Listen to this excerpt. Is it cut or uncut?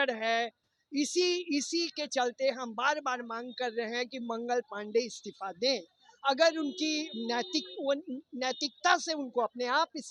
uncut